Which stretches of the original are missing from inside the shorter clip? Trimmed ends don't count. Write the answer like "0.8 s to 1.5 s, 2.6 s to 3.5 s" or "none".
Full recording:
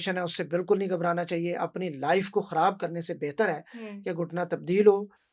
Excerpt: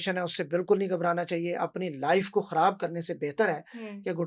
none

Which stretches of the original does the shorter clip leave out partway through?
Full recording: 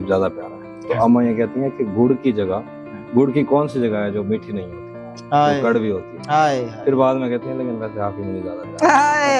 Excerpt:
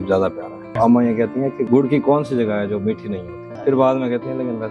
0.8 s to 1.0 s, 1.8 s to 3.0 s, 4.9 s to 6.7 s

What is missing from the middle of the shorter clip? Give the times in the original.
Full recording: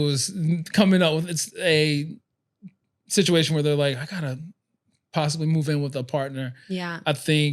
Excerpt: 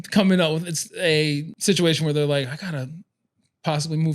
2.1 s to 3.0 s

